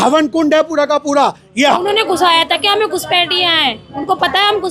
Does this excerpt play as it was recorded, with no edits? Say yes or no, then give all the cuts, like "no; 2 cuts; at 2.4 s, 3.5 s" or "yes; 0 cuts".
no; 1 cut; at 1.8 s